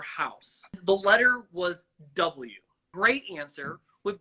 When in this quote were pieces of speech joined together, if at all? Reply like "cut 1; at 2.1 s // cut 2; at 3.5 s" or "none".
cut 1; at 0.8 s // cut 2; at 2.9 s